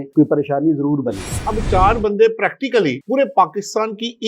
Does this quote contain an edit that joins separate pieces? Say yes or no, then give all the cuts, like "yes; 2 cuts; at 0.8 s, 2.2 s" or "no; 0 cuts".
yes; 1 cut; at 1.3 s